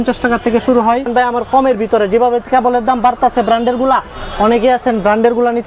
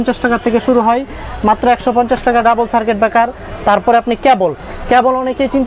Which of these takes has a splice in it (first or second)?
first